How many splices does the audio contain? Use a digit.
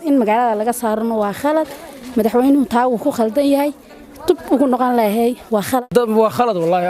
1